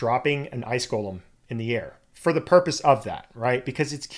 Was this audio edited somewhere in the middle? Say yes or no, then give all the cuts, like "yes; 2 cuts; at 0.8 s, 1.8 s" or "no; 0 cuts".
no; 0 cuts